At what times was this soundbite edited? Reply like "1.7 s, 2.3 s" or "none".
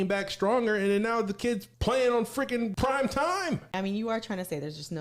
1.7 s, 2.7 s, 3.7 s